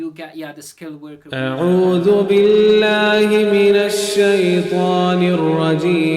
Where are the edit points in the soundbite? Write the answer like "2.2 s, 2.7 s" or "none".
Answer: 1.3 s